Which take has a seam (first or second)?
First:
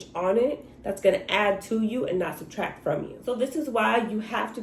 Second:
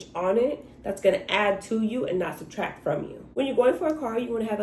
first